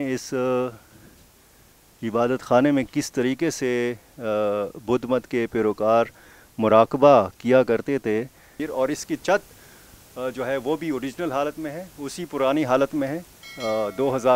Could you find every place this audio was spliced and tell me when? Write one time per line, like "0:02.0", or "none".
0:08.6